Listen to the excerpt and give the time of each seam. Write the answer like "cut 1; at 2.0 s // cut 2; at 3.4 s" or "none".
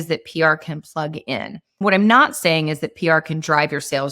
cut 1; at 1.8 s